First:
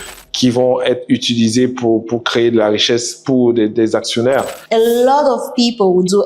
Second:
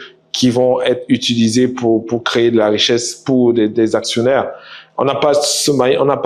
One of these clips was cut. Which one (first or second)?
first